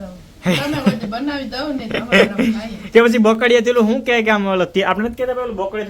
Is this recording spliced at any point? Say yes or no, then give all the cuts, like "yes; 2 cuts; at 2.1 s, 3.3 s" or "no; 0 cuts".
no; 0 cuts